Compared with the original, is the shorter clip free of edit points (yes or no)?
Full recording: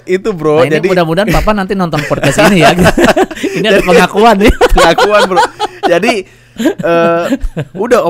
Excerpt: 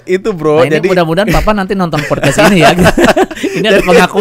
yes